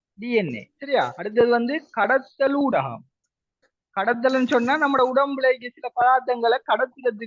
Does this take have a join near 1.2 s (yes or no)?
yes